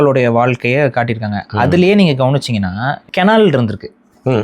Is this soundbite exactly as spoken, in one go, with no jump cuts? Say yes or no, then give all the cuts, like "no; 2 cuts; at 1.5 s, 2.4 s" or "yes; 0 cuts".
no; 1 cut; at 3.0 s